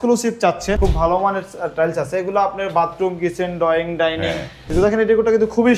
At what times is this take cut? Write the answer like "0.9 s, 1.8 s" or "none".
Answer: 0.8 s, 4.7 s